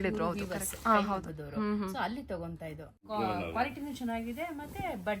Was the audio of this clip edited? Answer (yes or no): yes